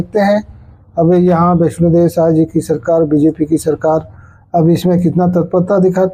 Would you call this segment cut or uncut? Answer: uncut